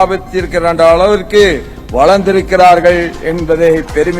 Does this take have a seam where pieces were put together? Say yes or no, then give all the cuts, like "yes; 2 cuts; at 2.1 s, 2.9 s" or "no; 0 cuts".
no; 0 cuts